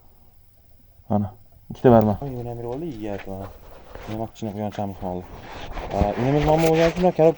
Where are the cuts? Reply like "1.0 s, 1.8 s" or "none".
2.2 s